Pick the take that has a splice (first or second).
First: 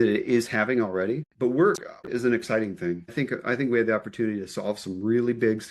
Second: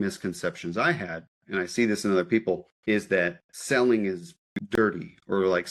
first